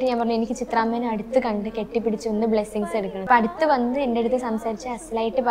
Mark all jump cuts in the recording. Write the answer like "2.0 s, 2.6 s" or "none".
3.2 s